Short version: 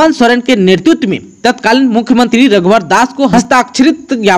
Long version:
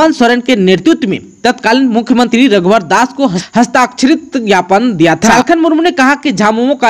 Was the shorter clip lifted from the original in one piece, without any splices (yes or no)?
no